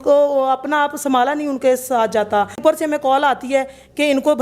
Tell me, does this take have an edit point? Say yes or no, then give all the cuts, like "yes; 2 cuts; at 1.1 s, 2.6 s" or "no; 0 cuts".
yes; 1 cut; at 2.6 s